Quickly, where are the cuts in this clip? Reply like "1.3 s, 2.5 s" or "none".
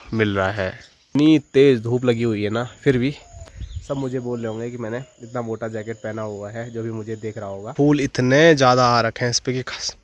1.1 s, 7.7 s